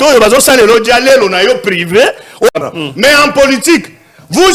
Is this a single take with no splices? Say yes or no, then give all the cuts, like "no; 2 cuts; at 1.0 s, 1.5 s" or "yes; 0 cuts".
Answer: no; 1 cut; at 2.6 s